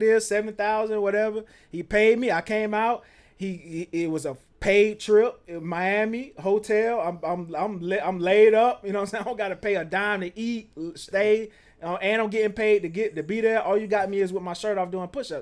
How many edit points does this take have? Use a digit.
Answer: 0